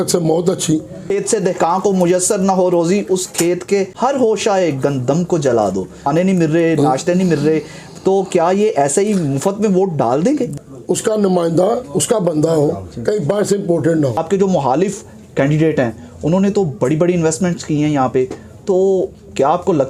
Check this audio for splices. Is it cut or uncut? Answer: cut